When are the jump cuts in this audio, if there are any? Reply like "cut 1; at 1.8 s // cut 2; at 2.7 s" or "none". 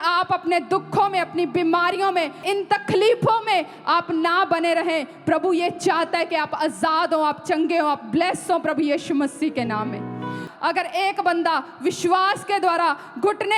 cut 1; at 2.4 s // cut 2; at 10.5 s